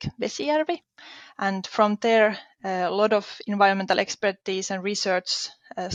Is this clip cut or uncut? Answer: uncut